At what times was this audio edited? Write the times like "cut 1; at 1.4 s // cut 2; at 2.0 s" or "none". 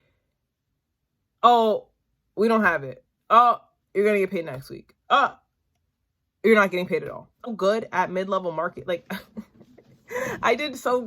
cut 1; at 7.4 s